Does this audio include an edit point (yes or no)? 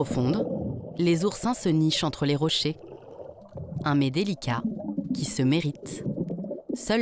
no